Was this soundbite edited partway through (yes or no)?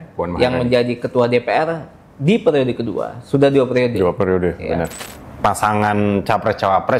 yes